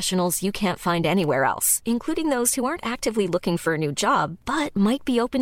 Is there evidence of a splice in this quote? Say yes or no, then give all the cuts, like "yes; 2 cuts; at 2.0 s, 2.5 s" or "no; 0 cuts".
no; 0 cuts